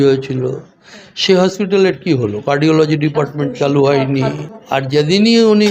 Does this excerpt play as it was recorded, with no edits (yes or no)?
no